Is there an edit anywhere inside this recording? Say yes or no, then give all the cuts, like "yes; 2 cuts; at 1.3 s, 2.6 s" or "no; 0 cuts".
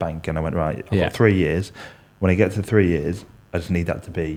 no; 0 cuts